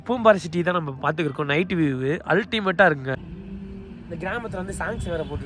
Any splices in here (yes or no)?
yes